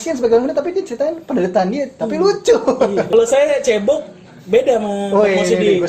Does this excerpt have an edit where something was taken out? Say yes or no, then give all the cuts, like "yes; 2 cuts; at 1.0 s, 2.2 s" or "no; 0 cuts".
yes; 1 cut; at 3.1 s